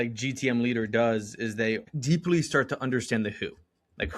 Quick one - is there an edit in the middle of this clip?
yes; 1 cut; at 1.9 s

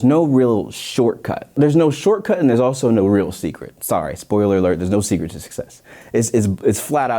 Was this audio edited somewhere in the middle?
yes; 1 cut; at 1.5 s

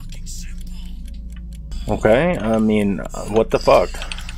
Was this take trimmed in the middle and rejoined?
yes; 1 cut; at 1.7 s

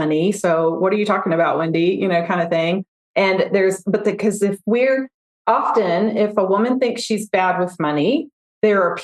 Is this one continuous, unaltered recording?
yes; 0 cuts

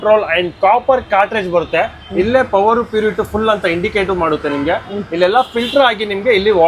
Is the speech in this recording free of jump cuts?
yes; 0 cuts

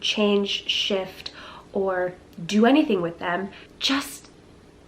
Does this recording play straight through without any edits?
no; 1 cut; at 3.7 s

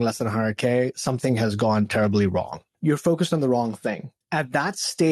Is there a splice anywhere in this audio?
yes; 2 cuts; at 2.6 s, 4.1 s

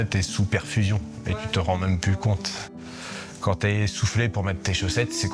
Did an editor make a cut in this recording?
yes; 1 cut; at 2.7 s

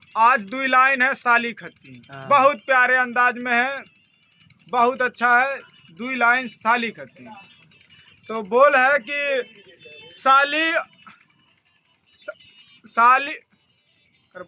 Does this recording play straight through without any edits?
yes; 0 cuts

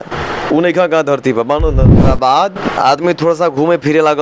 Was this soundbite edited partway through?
yes; 1 cut; at 2.1 s

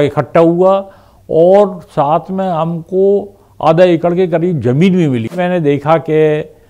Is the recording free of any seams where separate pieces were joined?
no; 1 cut; at 5.4 s

